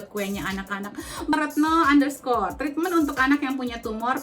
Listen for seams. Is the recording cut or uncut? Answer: cut